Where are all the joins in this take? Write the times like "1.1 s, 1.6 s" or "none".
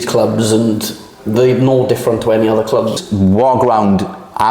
3.0 s